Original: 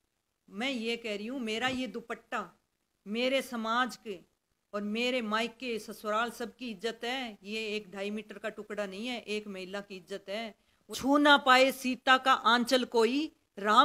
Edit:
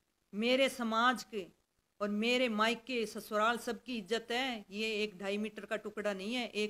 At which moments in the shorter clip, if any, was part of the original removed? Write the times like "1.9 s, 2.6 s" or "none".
none